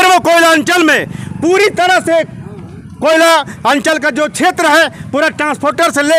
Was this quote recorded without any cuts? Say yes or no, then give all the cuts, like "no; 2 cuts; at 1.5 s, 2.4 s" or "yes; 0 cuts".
yes; 0 cuts